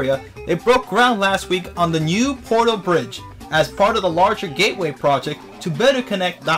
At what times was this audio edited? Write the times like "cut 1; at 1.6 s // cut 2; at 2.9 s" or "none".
cut 1; at 4.6 s

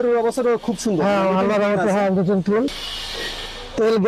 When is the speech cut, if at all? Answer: cut 1; at 2.8 s

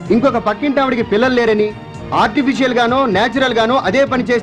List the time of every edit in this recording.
none

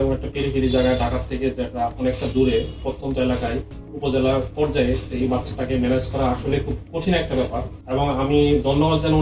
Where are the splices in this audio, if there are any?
none

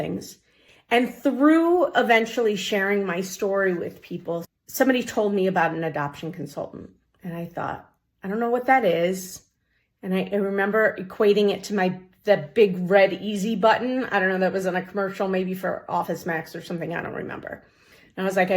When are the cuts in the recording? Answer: cut 1; at 4.5 s

